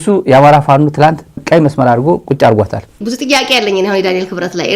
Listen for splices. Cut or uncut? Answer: cut